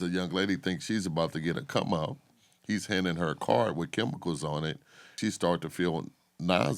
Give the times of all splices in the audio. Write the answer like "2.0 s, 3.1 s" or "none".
5.1 s